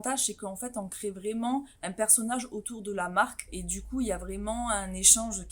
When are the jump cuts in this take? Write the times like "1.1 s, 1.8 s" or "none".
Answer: 3.6 s